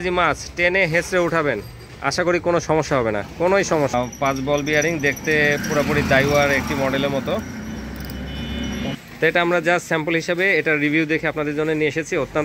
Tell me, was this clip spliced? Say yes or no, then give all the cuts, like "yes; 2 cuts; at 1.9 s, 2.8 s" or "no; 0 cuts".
yes; 2 cuts; at 3.9 s, 9.0 s